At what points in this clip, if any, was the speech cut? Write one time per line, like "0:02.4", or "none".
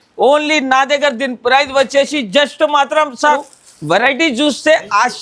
0:03.5